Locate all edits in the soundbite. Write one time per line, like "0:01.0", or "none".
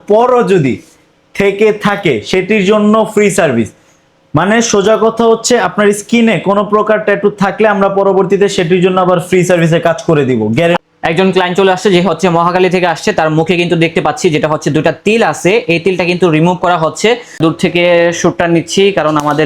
0:10.8
0:17.3

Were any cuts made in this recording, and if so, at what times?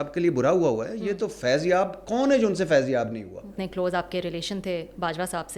0:03.6

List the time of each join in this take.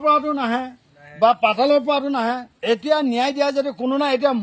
none

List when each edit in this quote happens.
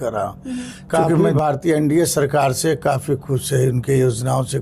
0:01.2

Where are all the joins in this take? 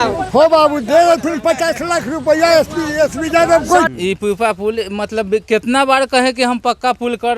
0:03.9

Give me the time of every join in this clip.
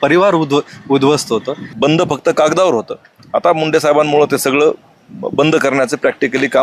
0:01.7

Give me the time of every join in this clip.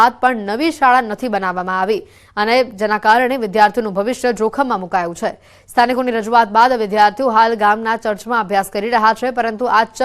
0:04.3

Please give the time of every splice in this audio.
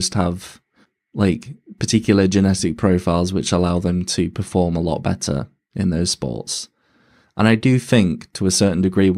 none

